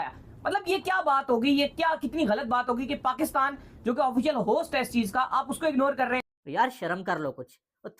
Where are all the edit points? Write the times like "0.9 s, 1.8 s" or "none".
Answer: 6.3 s